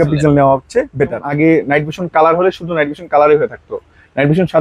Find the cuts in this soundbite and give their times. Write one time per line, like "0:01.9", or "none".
0:01.3